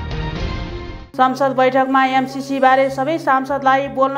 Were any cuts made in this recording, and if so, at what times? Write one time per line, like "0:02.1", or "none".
0:01.0